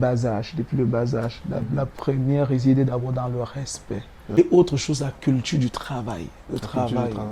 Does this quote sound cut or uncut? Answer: cut